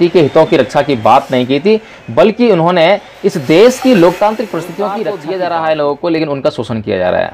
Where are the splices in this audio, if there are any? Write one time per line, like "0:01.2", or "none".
0:05.2